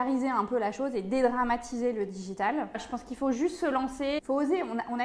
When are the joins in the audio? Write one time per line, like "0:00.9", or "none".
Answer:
0:02.7
0:04.2